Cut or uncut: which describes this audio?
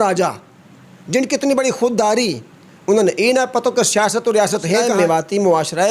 cut